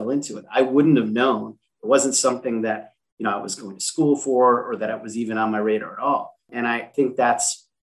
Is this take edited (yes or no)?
yes